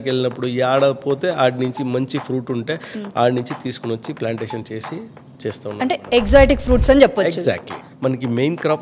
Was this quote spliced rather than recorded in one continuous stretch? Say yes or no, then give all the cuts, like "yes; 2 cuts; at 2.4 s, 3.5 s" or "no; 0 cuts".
yes; 1 cut; at 7.7 s